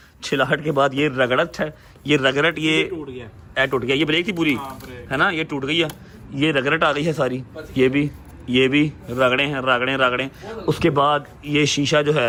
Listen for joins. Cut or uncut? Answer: uncut